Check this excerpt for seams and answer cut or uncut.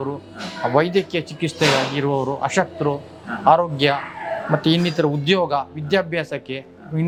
uncut